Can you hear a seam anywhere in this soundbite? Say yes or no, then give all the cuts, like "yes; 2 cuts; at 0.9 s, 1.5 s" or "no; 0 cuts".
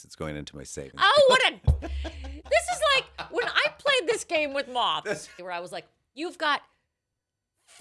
yes; 1 cut; at 5.3 s